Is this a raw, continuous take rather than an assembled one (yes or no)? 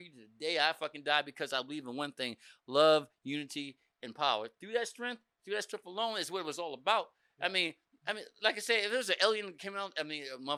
yes